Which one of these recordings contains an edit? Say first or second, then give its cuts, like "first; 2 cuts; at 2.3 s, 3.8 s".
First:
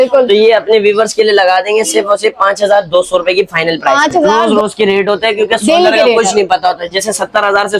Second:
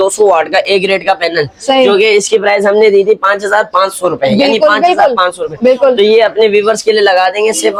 first; 1 cut; at 4.4 s